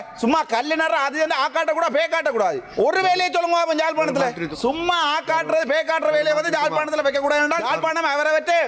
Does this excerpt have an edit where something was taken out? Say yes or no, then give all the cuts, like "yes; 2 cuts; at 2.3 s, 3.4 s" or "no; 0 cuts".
yes; 3 cuts; at 2.6 s, 4.5 s, 7.7 s